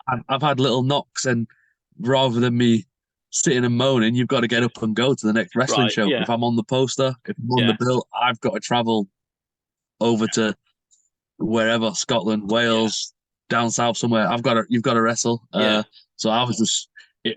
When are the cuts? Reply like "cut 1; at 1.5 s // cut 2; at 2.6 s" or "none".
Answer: none

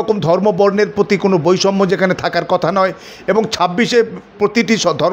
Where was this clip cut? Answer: none

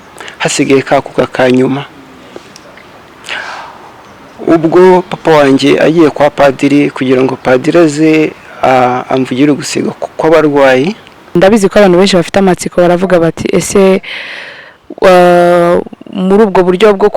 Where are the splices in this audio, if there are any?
cut 1; at 11.4 s

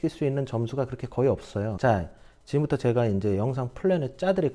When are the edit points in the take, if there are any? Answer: cut 1; at 1.7 s

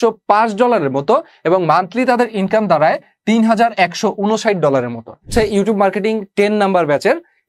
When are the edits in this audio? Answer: cut 1; at 5.3 s

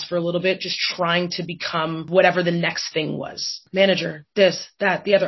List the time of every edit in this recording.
cut 1; at 2.1 s // cut 2; at 3.6 s

